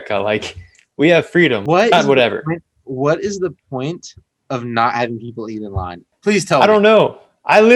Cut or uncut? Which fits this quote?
cut